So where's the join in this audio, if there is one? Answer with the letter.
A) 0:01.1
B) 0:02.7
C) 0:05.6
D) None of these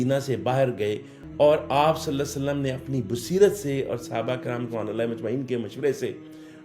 A